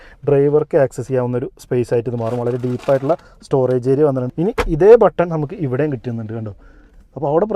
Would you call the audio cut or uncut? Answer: cut